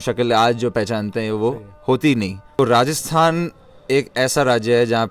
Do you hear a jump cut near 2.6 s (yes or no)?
yes